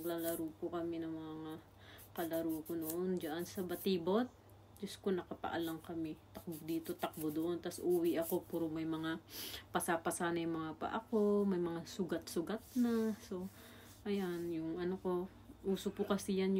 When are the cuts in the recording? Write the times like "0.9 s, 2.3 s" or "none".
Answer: none